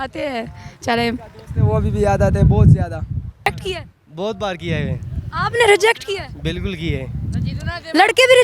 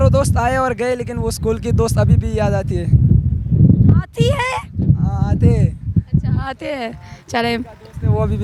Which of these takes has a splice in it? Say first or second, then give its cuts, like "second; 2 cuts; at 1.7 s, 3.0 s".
first; 1 cut; at 3.5 s